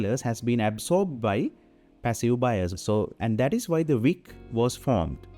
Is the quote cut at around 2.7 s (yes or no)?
yes